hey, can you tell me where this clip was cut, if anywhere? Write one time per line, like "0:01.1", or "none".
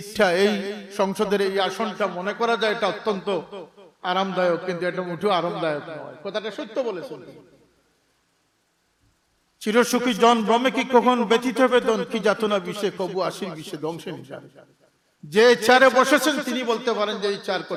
none